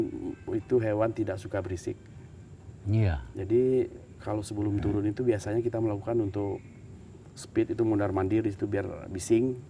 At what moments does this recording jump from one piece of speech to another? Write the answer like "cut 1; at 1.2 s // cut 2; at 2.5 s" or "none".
none